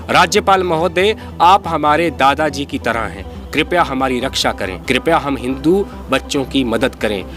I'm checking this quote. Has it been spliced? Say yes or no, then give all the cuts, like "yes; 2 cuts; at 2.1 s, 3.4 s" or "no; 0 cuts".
yes; 1 cut; at 4.7 s